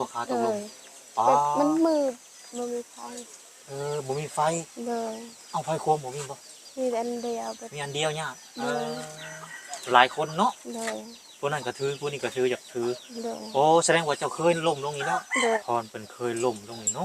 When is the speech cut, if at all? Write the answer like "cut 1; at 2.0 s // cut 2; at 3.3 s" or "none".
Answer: cut 1; at 15.6 s